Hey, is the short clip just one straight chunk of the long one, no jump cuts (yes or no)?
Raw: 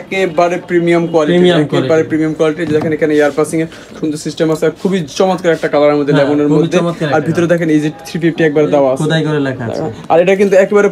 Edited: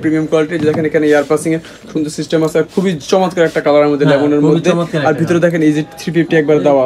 yes